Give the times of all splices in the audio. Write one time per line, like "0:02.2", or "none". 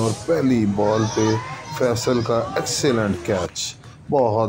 none